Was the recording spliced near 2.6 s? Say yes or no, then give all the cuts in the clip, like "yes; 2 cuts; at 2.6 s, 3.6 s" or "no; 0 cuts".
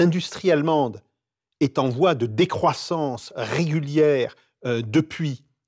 no; 0 cuts